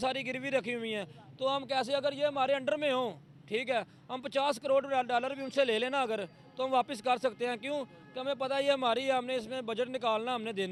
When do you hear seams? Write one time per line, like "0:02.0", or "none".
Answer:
none